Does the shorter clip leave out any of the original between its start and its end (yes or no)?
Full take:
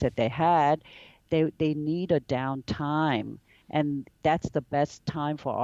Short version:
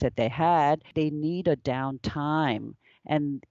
yes